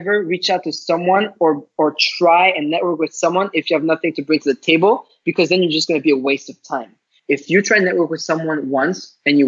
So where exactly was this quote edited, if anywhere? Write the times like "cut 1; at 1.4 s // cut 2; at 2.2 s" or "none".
cut 1; at 7.1 s

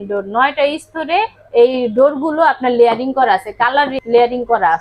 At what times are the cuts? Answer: cut 1; at 3.9 s

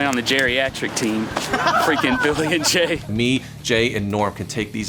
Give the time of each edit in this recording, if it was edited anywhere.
cut 1; at 3.1 s

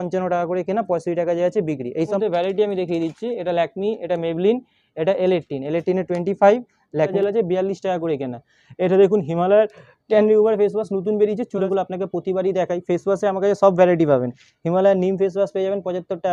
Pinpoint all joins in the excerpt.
cut 1; at 2.2 s // cut 2; at 7.1 s // cut 3; at 11.6 s

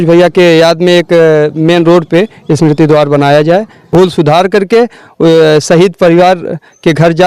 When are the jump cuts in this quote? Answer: cut 1; at 3.9 s

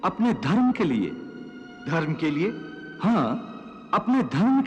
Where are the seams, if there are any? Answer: none

